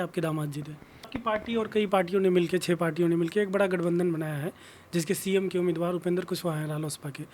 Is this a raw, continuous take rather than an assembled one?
no; 1 cut; at 1.1 s

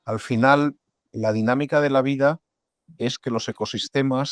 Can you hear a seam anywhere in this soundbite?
no; 0 cuts

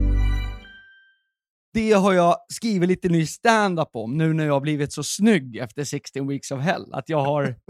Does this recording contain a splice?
yes; 1 cut; at 1.7 s

